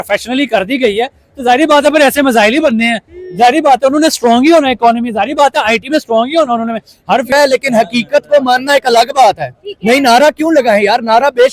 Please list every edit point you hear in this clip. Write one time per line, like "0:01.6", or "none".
0:07.3